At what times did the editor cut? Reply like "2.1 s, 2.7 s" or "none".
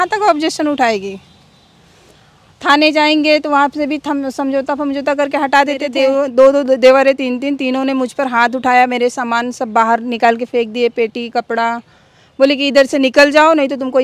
5.9 s

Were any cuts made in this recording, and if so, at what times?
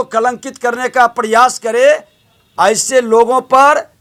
none

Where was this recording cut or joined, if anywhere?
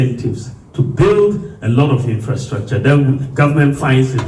none

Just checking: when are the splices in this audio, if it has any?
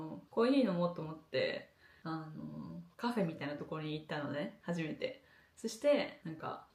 none

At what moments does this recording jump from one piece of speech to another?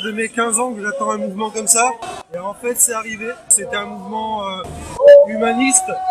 2.1 s, 3.5 s

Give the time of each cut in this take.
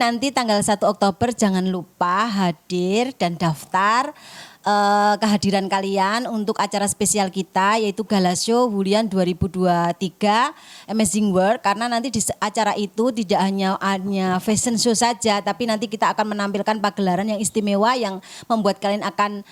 none

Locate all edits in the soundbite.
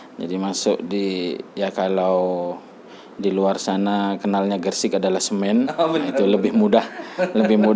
none

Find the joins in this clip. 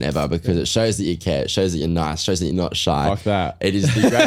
none

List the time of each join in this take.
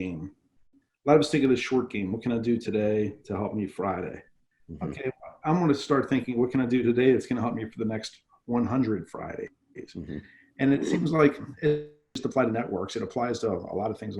12.2 s

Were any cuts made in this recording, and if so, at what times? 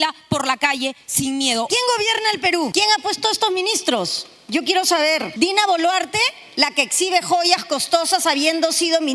1.7 s, 2.7 s, 5.3 s

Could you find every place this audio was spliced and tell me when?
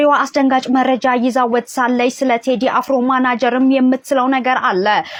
none

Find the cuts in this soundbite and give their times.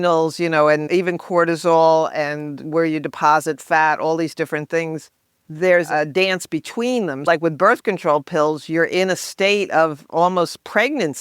0.8 s, 5.9 s, 7.3 s

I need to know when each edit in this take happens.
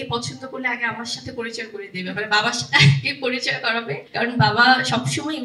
4.0 s

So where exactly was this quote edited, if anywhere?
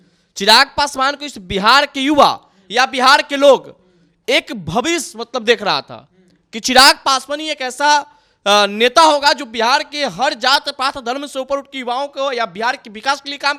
none

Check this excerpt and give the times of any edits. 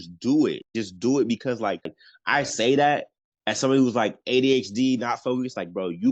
2.0 s

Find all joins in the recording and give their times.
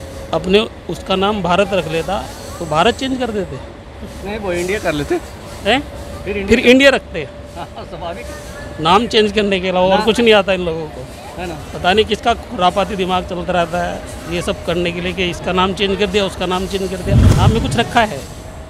17.3 s

